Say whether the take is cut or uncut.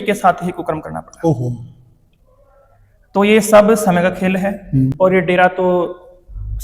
cut